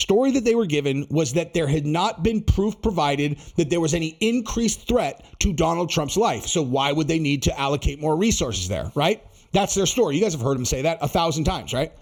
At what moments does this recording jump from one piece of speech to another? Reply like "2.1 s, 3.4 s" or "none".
none